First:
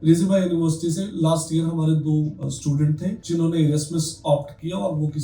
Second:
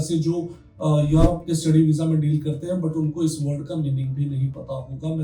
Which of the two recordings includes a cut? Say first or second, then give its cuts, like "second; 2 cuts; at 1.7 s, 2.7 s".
first; 1 cut; at 2.6 s